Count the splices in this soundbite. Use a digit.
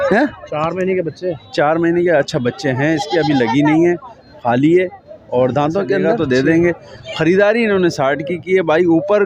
1